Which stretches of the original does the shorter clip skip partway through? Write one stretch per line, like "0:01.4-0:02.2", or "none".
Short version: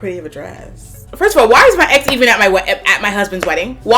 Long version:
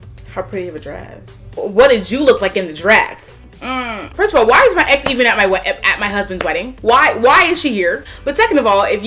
0:01.5-0:04.0